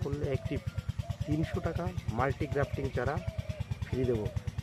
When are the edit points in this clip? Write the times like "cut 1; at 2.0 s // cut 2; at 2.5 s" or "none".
none